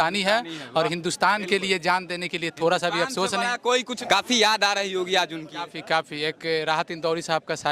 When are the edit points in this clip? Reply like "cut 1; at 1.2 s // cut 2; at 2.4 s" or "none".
cut 1; at 3.9 s